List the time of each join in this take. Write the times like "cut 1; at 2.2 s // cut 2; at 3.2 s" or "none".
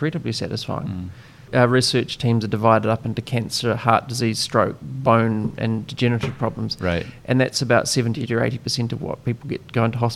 cut 1; at 1.5 s